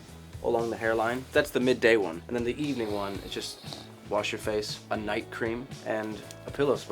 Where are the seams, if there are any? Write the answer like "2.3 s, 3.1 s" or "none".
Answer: 1.2 s, 2.2 s, 4.8 s, 5.9 s